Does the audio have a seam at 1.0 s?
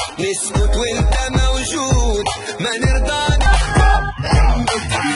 no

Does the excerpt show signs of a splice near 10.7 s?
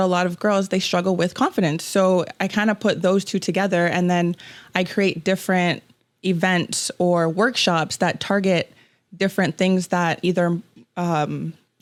no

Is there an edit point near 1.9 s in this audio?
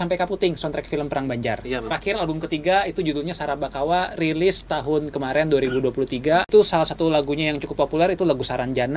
yes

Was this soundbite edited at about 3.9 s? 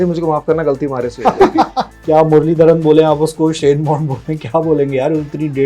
no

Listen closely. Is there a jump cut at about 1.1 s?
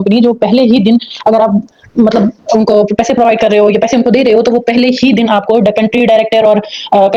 no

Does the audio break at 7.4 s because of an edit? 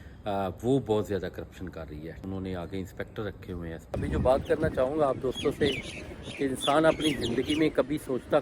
no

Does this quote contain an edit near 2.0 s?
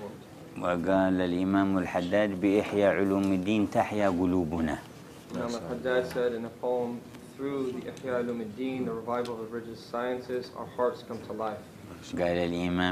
no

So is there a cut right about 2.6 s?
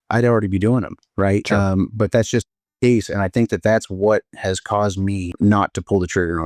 no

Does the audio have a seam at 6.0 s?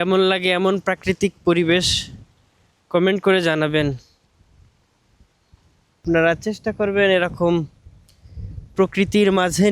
yes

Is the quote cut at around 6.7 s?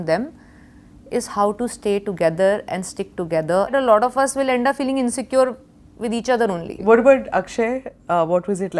yes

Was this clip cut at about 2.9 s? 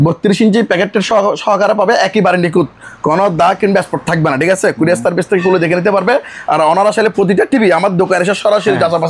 no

